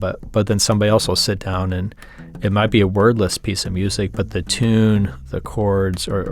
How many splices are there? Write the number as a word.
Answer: one